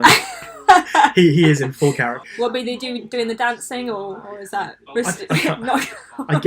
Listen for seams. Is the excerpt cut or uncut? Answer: cut